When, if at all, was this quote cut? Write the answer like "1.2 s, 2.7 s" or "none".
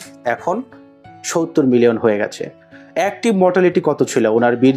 none